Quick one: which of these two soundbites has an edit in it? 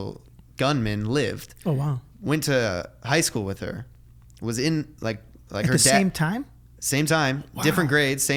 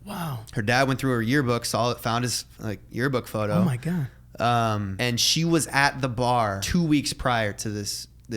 second; 2 cuts; at 4.9 s, 6.6 s

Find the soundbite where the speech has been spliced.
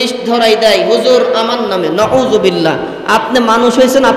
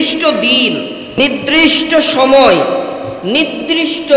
second; 1 cut; at 1.2 s

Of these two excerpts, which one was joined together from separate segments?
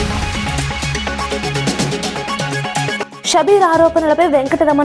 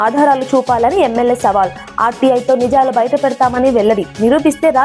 first; 1 cut; at 2.6 s

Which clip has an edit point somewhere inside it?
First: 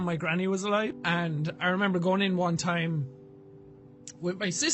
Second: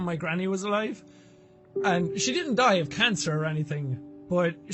first; 1 cut; at 1.0 s

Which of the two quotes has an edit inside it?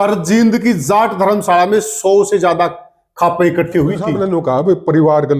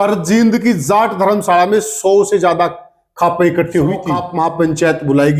first; 1 cut; at 4.1 s

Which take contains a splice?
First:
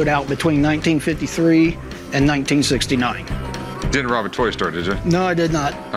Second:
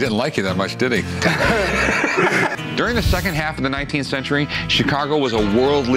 second; 1 cut; at 2.5 s

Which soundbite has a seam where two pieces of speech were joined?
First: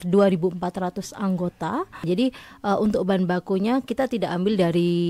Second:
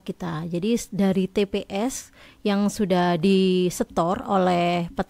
first; 1 cut; at 2.0 s

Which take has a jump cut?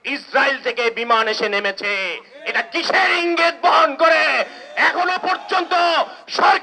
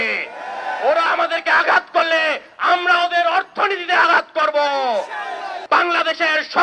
second; 1 cut; at 5.5 s

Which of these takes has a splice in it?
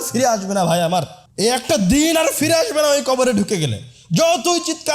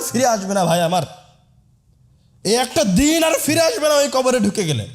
first; 1 cut; at 1.2 s

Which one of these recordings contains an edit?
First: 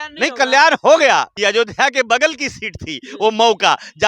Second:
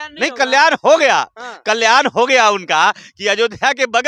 first; 1 cut; at 1.3 s

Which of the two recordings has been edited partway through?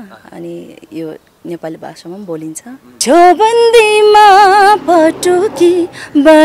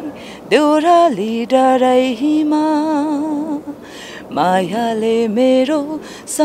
first; 1 cut; at 2.9 s

